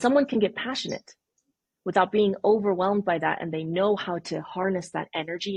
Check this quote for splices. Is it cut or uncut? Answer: uncut